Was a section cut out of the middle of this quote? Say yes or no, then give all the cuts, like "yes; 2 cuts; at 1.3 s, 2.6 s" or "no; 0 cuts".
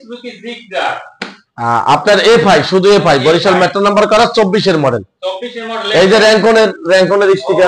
no; 0 cuts